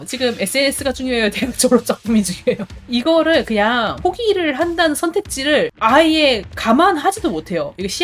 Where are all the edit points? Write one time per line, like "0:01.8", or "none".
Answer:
0:02.8
0:04.0